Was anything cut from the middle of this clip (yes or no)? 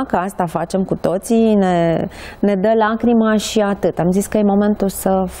no